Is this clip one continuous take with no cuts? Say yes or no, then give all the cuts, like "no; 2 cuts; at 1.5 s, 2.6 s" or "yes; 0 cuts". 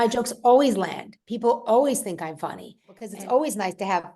no; 1 cut; at 3.0 s